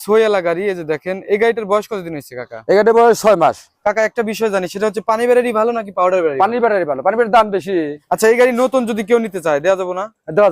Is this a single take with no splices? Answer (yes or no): no